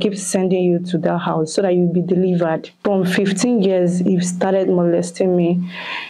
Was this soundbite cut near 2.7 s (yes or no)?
yes